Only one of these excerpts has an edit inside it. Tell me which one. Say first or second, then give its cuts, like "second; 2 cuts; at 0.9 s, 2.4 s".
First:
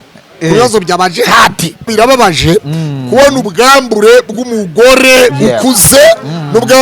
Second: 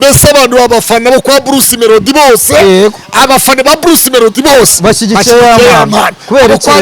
first; 1 cut; at 1.9 s